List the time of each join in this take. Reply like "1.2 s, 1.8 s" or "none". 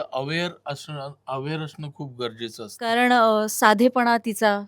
2.8 s